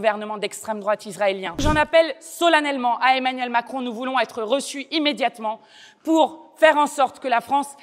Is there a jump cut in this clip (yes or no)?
yes